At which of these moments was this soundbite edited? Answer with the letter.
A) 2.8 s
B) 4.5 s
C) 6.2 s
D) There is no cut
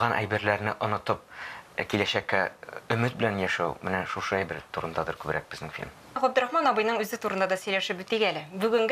C